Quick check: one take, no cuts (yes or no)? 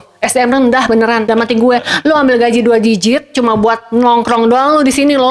yes